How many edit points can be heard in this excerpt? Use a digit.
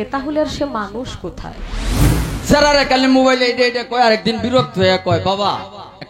1